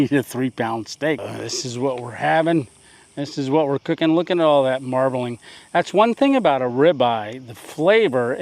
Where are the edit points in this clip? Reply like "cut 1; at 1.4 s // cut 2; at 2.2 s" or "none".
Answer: cut 1; at 1.2 s